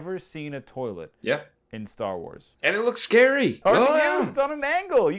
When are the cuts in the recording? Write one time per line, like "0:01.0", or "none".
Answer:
0:02.4
0:03.6